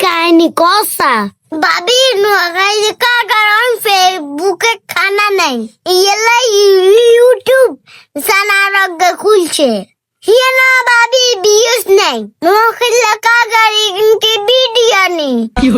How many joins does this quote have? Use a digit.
0